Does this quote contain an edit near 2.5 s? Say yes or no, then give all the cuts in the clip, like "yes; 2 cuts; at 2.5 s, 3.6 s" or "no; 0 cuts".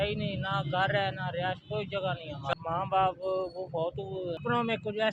yes; 2 cuts; at 2.5 s, 4.4 s